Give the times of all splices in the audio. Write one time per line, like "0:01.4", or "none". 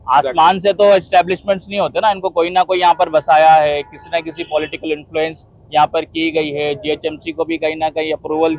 none